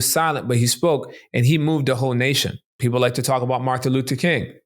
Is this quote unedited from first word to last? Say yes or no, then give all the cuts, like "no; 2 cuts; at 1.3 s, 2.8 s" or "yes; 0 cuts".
no; 1 cut; at 2.7 s